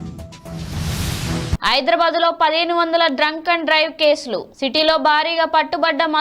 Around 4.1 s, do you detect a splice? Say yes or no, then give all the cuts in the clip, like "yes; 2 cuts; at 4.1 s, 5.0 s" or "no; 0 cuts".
no; 1 cut; at 1.5 s